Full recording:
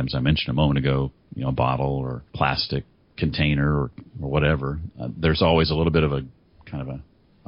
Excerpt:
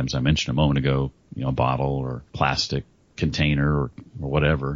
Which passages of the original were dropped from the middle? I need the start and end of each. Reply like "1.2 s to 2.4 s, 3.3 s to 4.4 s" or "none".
none